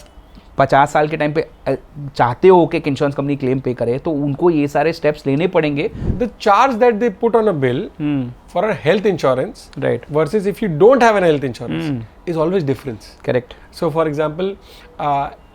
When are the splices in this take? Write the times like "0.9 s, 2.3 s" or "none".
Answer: 6.0 s